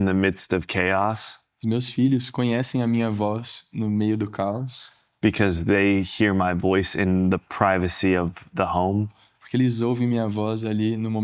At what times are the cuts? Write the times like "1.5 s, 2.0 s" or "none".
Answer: none